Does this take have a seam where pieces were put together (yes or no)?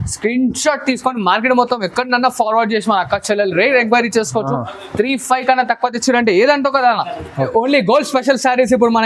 yes